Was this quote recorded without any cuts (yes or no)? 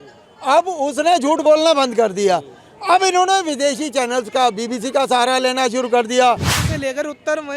no